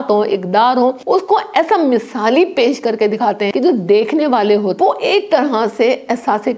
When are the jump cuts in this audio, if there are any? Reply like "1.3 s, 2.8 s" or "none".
1.0 s, 3.5 s, 4.7 s